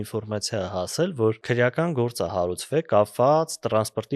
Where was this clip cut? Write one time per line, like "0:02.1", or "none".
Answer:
0:01.4